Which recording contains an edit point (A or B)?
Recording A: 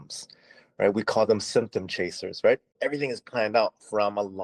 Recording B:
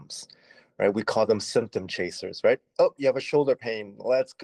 A